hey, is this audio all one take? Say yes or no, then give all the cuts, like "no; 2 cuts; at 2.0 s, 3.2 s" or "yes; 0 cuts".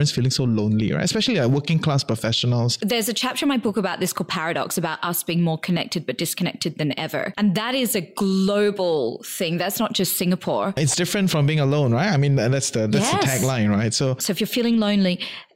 no; 4 cuts; at 2.7 s, 7.3 s, 10.8 s, 14.2 s